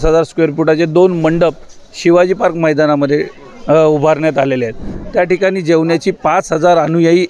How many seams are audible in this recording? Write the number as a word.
one